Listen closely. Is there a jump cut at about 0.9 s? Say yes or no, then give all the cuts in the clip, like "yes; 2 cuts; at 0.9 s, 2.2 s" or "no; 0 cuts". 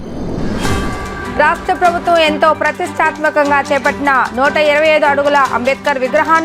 yes; 1 cut; at 0.9 s